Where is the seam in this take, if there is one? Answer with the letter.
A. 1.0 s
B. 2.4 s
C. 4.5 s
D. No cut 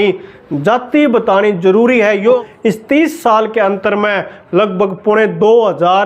B